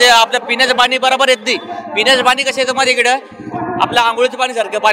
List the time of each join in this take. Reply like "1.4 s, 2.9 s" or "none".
none